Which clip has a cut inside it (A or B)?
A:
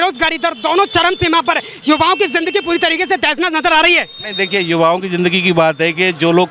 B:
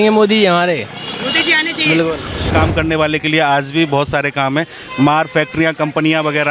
B